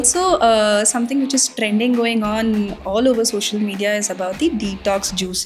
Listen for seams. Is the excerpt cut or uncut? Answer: uncut